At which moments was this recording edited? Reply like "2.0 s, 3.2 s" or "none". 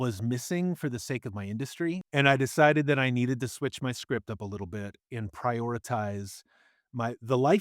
2.0 s